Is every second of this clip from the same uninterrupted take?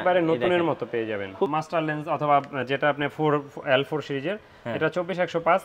no; 1 cut; at 1.5 s

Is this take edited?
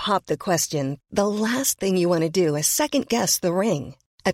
no; 0 cuts

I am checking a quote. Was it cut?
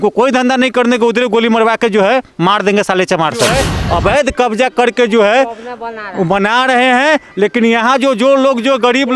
yes; 1 cut; at 3.7 s

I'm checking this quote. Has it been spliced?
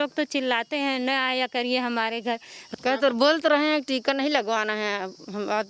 no; 0 cuts

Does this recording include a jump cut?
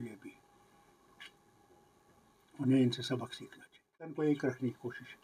yes; 1 cut; at 4.2 s

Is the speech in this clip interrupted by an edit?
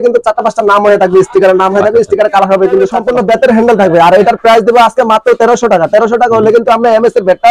yes; 1 cut; at 3.0 s

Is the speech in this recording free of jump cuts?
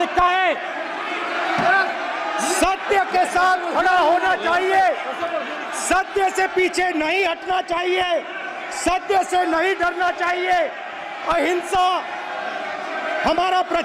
yes; 0 cuts

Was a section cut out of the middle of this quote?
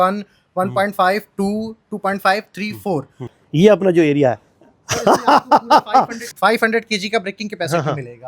yes; 2 cuts; at 3.3 s, 6.2 s

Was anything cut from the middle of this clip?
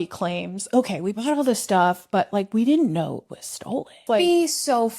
yes; 1 cut; at 4.0 s

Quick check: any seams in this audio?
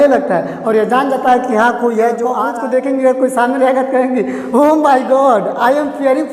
yes; 1 cut; at 2.3 s

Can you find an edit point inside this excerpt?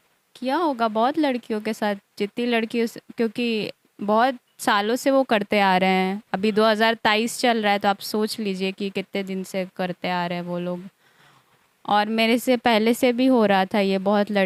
no; 0 cuts

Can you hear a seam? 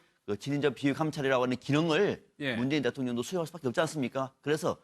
yes; 1 cut; at 2.3 s

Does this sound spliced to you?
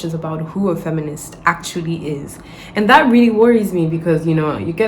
no; 0 cuts

